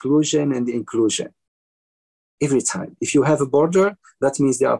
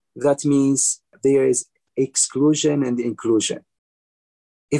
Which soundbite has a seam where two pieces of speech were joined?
second; 1 cut; at 1.1 s

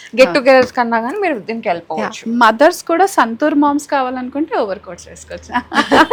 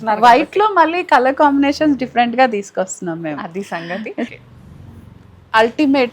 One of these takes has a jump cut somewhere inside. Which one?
second; 1 cut; at 4.3 s

